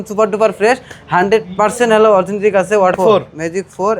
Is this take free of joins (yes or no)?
no